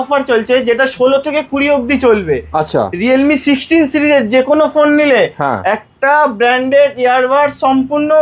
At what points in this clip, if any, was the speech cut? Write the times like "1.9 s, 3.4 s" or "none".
none